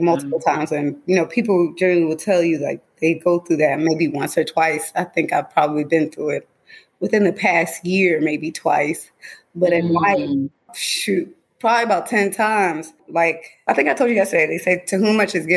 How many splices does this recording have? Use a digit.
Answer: 0